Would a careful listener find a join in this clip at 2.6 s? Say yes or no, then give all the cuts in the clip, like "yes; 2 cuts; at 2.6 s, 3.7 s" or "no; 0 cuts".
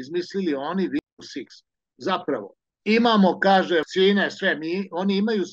no; 2 cuts; at 1.0 s, 3.9 s